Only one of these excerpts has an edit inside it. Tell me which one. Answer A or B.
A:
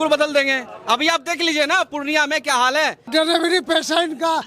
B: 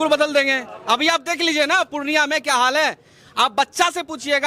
A